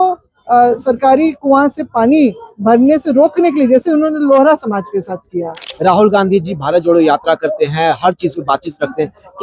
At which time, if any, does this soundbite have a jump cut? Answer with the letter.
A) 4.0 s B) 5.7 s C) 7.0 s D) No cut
B